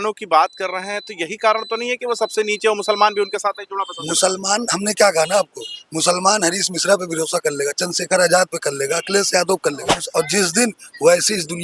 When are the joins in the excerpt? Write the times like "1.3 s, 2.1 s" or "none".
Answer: 10.0 s